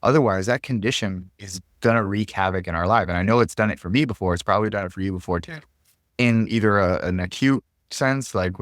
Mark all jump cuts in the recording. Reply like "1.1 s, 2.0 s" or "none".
none